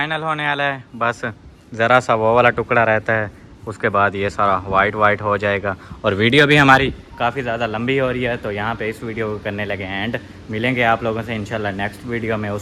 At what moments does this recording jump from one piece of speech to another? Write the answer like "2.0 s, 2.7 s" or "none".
none